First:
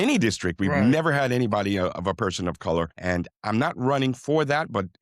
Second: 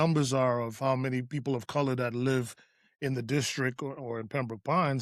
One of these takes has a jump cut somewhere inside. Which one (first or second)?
first